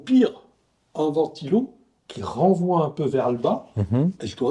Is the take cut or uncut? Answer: uncut